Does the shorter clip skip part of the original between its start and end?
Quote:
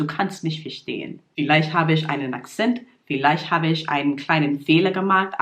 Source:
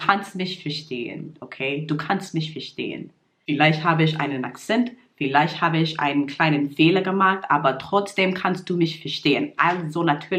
yes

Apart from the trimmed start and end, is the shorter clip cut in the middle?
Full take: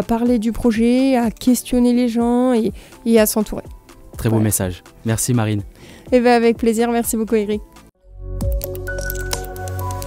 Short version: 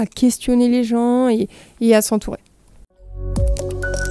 yes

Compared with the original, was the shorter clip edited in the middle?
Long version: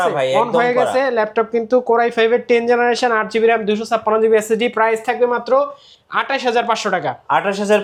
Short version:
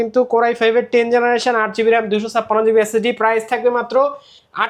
no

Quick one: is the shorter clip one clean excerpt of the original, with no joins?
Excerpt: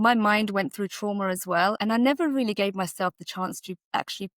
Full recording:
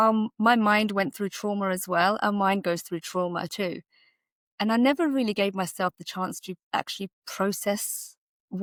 no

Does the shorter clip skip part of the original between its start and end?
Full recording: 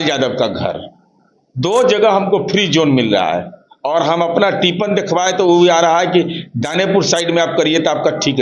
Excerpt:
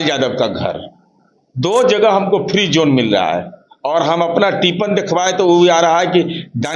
no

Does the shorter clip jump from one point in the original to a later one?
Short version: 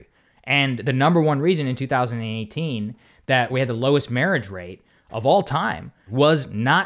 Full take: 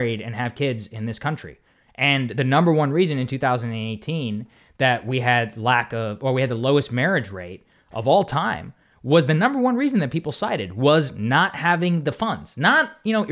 yes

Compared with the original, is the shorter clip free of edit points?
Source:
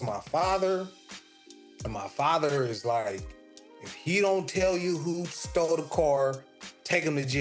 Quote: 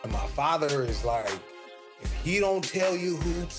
yes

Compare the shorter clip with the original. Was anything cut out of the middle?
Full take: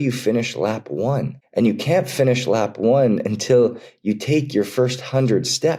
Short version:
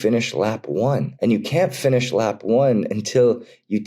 yes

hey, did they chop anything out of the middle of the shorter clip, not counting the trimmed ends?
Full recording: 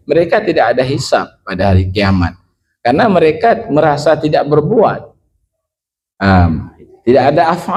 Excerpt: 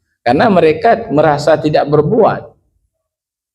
no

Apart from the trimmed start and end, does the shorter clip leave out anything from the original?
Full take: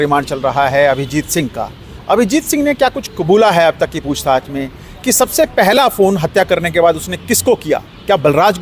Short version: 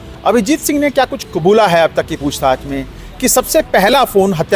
no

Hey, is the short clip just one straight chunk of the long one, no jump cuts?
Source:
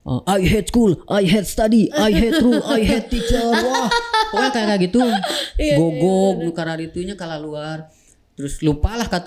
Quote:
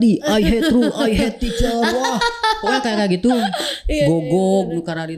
yes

